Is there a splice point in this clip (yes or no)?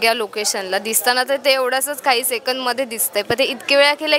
no